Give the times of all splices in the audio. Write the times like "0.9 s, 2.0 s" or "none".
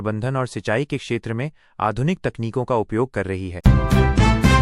3.5 s